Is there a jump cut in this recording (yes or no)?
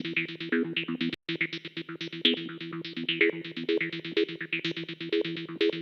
no